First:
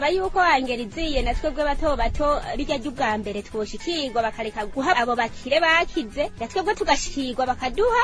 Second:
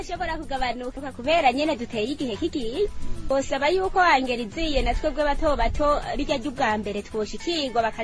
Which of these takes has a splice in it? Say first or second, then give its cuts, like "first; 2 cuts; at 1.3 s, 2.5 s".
second; 1 cut; at 1.0 s